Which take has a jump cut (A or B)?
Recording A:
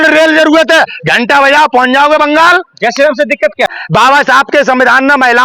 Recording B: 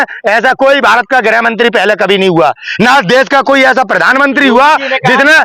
A